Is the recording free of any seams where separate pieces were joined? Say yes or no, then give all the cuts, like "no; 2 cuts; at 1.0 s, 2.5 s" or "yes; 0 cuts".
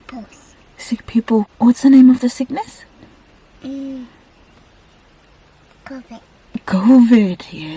no; 1 cut; at 1.5 s